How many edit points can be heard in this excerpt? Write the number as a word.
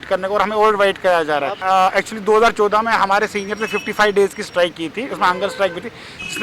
one